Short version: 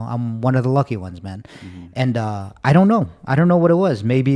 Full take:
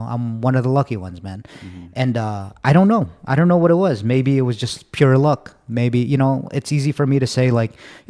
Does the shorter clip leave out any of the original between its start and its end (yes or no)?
no